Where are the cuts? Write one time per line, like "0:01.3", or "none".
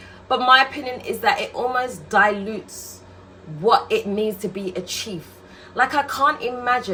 none

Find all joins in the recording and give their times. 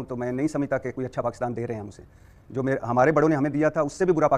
none

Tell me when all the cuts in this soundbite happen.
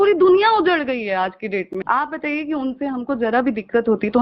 0:01.7

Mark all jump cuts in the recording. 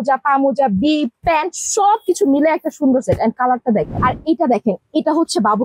0:03.9

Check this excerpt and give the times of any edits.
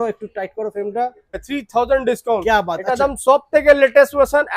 0:01.5

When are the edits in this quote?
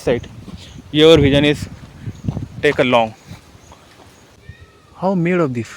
0:04.4

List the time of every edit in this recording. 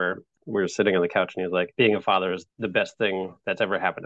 0:01.7
0:02.5

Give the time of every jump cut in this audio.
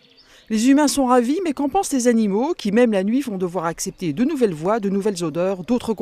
none

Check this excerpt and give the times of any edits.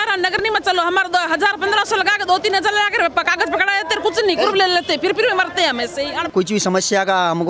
0:06.3

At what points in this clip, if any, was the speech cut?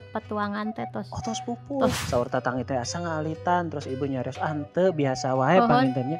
0:02.0

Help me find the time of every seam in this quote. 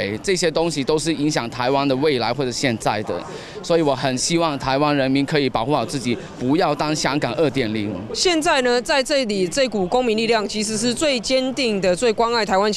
0:08.0

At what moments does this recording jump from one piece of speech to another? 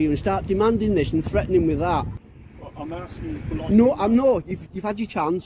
0:02.2

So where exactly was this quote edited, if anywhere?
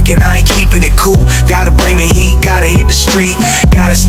none

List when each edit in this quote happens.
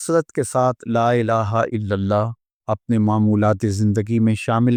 none

